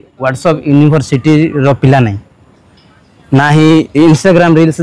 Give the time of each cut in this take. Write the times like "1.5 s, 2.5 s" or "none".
none